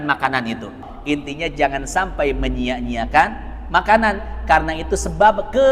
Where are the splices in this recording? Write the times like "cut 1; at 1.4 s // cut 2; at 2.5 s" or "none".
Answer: cut 1; at 0.9 s